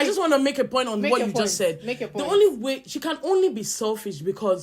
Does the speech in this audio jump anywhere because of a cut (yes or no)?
no